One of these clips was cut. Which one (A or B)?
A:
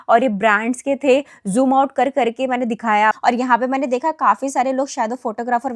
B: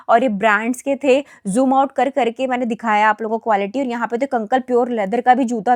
A